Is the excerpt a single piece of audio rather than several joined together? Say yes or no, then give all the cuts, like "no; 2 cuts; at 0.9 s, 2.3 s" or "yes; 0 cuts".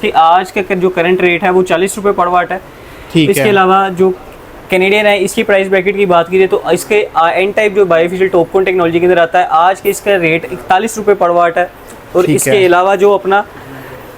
yes; 0 cuts